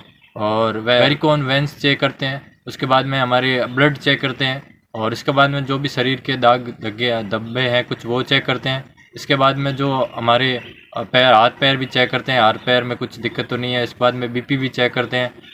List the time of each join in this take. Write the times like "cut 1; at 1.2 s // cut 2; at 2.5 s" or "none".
none